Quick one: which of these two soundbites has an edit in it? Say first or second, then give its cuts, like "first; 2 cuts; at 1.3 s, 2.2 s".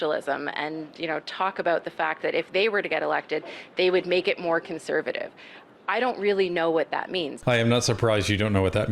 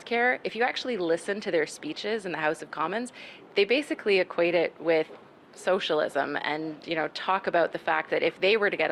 first; 1 cut; at 7.3 s